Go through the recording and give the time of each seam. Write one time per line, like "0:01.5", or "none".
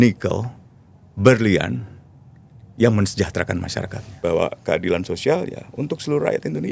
0:04.0